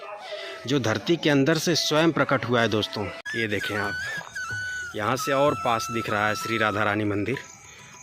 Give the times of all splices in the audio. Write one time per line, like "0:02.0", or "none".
0:03.2